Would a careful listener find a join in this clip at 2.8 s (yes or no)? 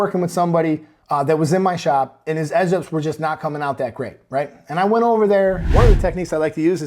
no